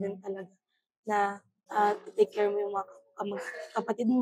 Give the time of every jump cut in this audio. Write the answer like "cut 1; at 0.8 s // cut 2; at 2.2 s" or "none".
cut 1; at 1.5 s